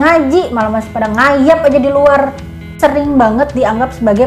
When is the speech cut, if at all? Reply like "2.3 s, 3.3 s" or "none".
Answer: 2.7 s